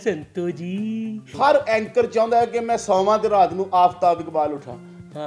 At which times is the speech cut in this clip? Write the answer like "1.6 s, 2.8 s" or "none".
1.2 s